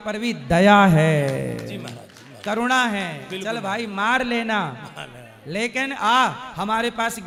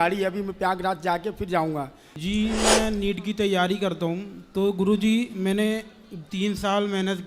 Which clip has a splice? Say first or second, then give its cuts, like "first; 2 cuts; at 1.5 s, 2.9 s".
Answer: second; 1 cut; at 2.0 s